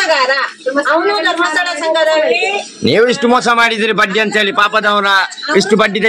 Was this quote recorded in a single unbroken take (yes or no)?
yes